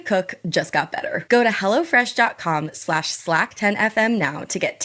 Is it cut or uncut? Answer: cut